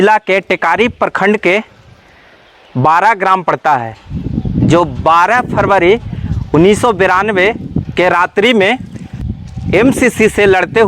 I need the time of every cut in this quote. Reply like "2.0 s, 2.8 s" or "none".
9.2 s